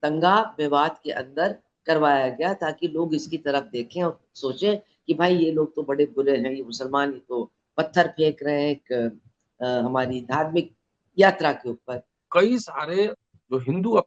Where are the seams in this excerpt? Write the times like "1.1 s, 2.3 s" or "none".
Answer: 12.3 s